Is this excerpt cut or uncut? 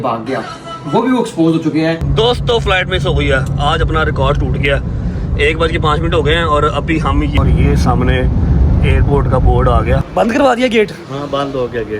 cut